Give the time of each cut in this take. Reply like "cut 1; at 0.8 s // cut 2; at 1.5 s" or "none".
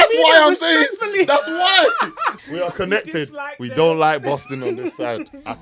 cut 1; at 2.3 s